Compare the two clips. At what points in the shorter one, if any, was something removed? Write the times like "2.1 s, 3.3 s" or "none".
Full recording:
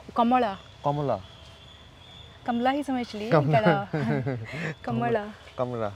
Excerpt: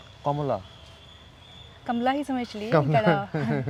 none